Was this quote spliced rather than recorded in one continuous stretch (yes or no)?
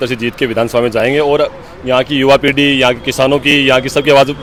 no